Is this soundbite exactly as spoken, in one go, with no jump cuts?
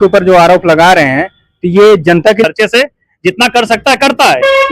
no; 1 cut; at 2.4 s

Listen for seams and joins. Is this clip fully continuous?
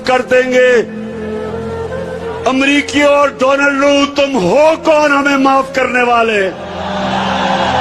no; 2 cuts; at 1.0 s, 2.4 s

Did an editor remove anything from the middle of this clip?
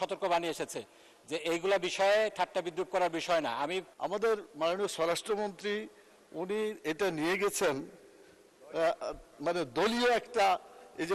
yes; 1 cut; at 3.9 s

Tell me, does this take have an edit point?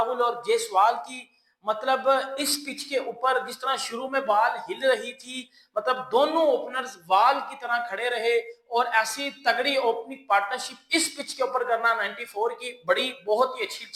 no; 0 cuts

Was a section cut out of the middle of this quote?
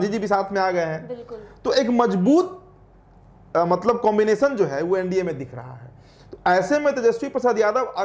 no; 0 cuts

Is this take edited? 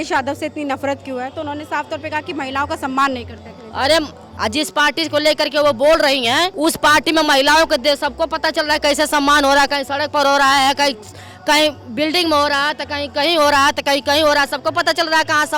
yes; 2 cuts; at 4.3 s, 6.5 s

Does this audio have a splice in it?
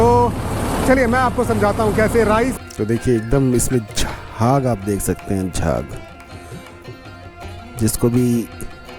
yes; 1 cut; at 2.6 s

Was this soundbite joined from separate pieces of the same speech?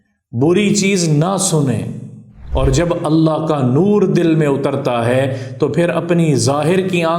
yes; 1 cut; at 2.4 s

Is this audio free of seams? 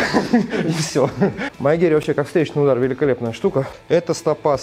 no; 2 cuts; at 1.5 s, 3.7 s

